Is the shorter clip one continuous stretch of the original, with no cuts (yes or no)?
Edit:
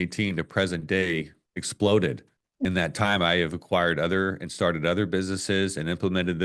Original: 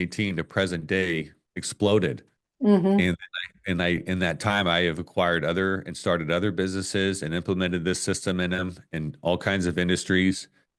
no